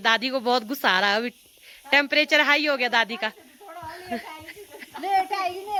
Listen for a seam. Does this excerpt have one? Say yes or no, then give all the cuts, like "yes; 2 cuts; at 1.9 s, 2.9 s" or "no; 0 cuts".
no; 0 cuts